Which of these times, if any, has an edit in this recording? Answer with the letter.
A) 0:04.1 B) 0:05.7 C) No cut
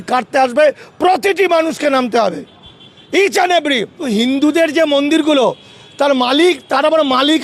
A